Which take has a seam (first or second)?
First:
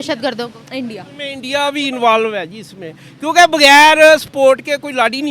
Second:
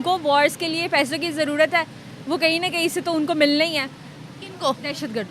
first